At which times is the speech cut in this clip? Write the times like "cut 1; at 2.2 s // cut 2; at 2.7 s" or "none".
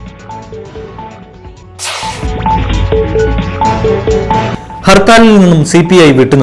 cut 1; at 1.4 s